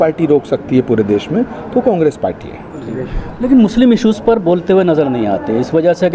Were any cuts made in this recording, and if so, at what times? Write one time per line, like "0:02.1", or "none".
none